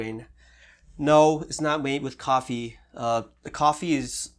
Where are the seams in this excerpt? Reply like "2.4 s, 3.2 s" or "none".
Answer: none